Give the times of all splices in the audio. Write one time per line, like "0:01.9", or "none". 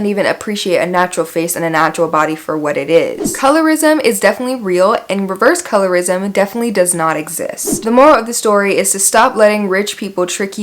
0:03.4
0:07.8